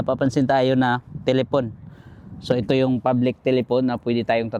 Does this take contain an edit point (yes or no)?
no